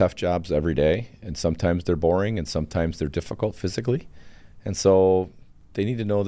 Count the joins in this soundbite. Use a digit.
0